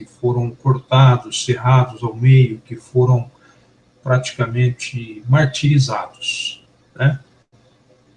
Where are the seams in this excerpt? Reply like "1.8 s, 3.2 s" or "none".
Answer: 5.9 s